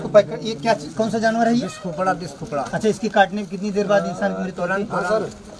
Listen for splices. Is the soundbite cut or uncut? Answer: uncut